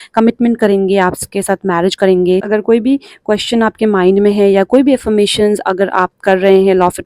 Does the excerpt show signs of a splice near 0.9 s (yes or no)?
no